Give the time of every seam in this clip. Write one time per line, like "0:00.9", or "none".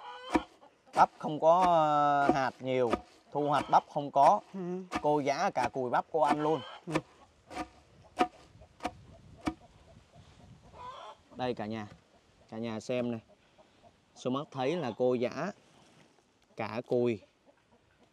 none